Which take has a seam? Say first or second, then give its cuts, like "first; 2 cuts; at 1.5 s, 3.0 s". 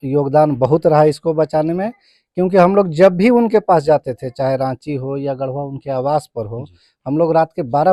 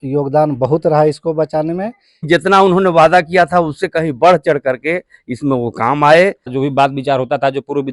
second; 2 cuts; at 2.3 s, 6.5 s